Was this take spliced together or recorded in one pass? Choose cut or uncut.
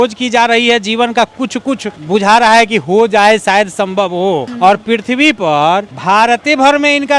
uncut